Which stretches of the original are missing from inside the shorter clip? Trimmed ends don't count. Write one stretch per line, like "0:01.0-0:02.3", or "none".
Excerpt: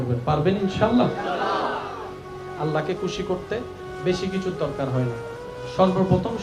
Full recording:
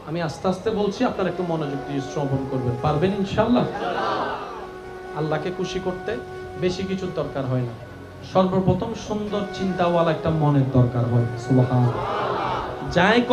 none

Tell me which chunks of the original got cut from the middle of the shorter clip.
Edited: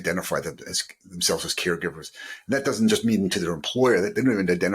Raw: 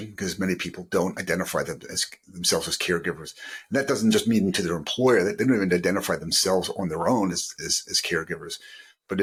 none

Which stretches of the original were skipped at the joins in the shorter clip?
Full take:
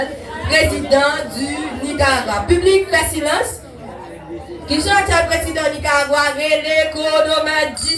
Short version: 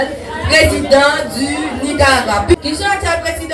0:02.5-0:04.6

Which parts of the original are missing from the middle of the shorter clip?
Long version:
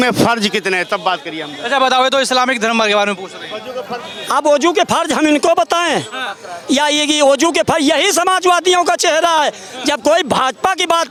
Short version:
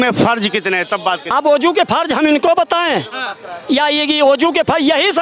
0:01.2-0:04.2

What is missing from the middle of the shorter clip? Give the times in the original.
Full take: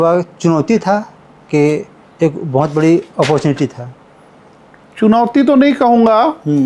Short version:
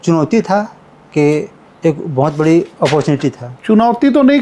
0:03.8-0:04.8

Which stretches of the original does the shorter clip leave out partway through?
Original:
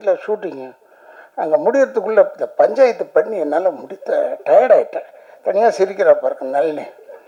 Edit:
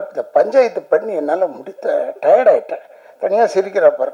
none

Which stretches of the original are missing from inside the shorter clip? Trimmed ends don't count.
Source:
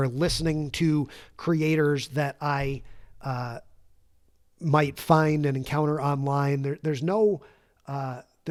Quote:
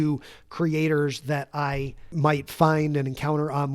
0:02.9-0:04.5

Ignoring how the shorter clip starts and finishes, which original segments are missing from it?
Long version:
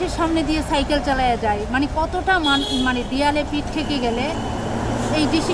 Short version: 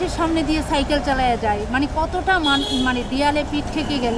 none

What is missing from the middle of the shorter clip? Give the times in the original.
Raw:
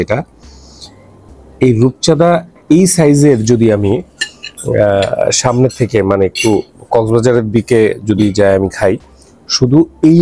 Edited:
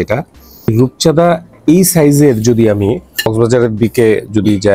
0:00.7-0:01.7
0:04.3-0:07.0

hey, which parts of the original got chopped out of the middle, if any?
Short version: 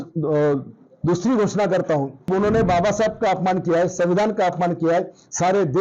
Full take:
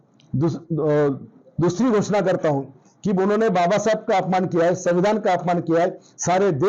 0:02.8-0:03.1

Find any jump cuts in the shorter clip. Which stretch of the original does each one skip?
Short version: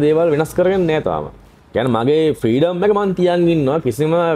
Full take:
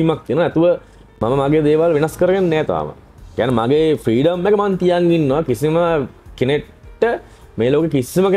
none

